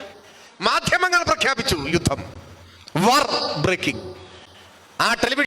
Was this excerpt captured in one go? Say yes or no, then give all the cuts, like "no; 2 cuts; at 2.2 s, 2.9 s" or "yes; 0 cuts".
yes; 0 cuts